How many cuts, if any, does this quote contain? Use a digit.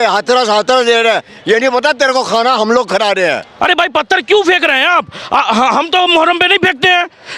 1